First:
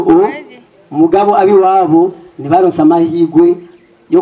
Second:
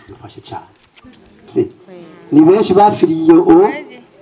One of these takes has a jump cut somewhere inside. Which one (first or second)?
second